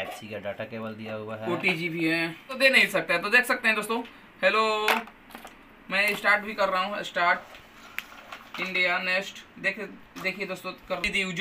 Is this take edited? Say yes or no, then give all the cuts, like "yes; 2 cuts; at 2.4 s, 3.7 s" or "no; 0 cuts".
yes; 1 cut; at 2.6 s